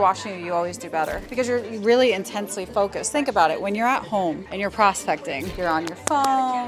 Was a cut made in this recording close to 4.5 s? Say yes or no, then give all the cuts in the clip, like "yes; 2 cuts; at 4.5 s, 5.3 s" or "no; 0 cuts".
yes; 3 cuts; at 1.2 s, 4.5 s, 5.5 s